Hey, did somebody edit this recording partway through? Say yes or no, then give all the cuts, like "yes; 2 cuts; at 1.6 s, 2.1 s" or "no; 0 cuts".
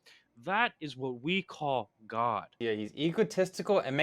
yes; 1 cut; at 2.5 s